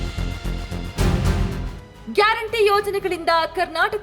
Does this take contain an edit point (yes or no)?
yes